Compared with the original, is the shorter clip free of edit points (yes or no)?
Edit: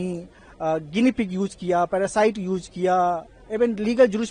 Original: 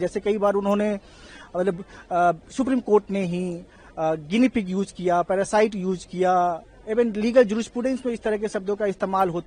yes